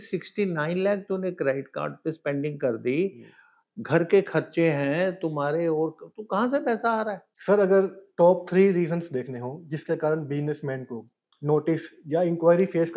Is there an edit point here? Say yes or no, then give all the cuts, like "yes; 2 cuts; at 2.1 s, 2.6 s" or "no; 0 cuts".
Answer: yes; 1 cut; at 7.3 s